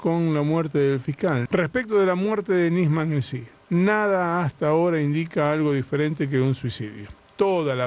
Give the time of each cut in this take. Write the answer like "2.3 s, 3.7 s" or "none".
1.4 s